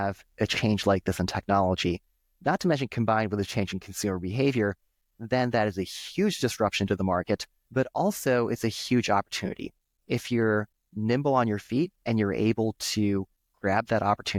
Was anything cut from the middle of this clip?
no; 0 cuts

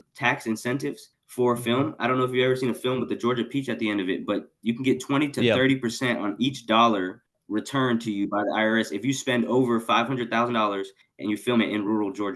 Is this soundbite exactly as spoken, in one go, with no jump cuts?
yes; 0 cuts

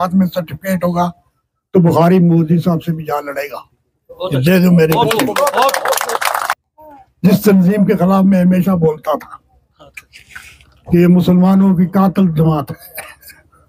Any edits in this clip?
yes; 1 cut; at 6.5 s

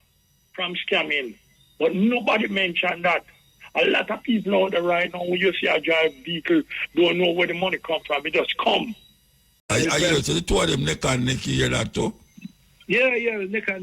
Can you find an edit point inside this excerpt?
yes; 1 cut; at 9.7 s

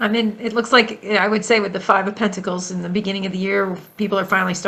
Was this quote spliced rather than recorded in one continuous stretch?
no; 0 cuts

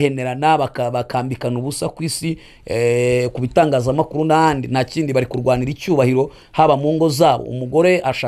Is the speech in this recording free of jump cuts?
yes; 0 cuts

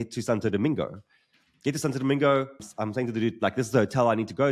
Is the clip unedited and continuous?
no; 1 cut; at 2.7 s

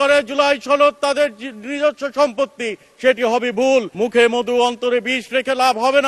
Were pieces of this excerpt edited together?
yes; 1 cut; at 3.9 s

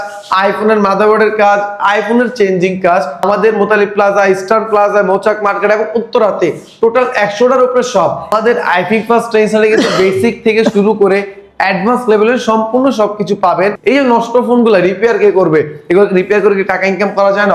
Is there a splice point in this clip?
yes; 3 cuts; at 3.2 s, 8.3 s, 13.8 s

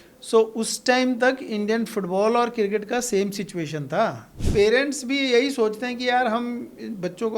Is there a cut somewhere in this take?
yes; 1 cut; at 4.4 s

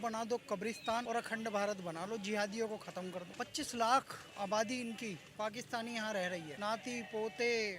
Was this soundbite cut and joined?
yes; 3 cuts; at 1.0 s, 3.3 s, 6.5 s

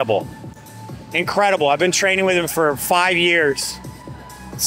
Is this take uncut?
yes; 0 cuts

